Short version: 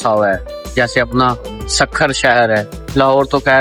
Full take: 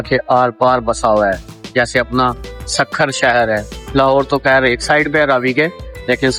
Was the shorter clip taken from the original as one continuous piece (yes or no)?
yes